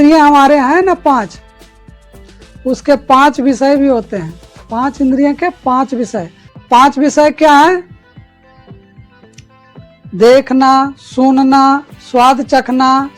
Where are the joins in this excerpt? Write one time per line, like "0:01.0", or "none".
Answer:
0:06.4